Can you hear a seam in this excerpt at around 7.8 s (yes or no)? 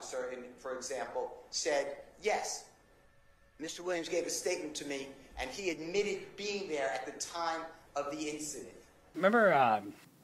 no